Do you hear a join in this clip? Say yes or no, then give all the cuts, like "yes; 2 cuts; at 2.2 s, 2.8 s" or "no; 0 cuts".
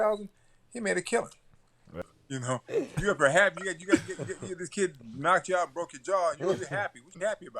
yes; 1 cut; at 1.8 s